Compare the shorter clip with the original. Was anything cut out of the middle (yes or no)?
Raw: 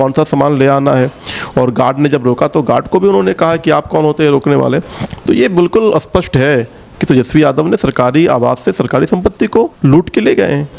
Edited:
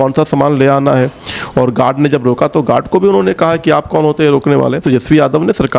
yes